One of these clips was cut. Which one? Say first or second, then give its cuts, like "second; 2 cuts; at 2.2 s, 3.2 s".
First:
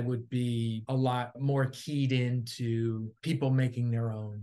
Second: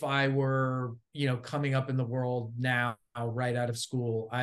first; 2 cuts; at 1.1 s, 3.1 s